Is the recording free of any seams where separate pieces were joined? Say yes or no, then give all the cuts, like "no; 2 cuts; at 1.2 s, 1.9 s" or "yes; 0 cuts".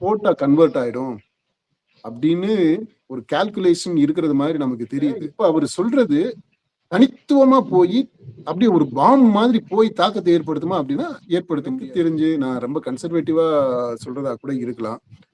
no; 2 cuts; at 5.3 s, 11.8 s